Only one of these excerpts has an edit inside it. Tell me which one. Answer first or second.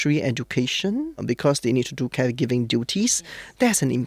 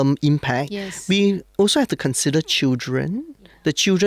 first